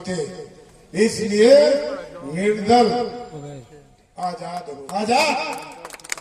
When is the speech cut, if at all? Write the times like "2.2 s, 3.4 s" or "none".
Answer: 4.7 s